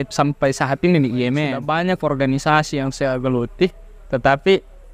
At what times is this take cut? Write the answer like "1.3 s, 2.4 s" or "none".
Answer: 1.6 s